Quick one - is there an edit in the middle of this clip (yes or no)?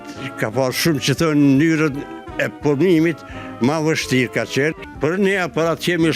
yes